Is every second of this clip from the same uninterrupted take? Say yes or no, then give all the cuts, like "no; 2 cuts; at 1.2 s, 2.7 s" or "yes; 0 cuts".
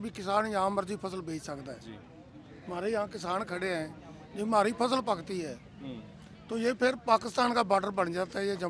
yes; 0 cuts